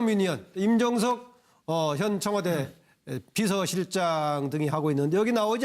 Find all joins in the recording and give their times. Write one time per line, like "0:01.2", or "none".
0:04.5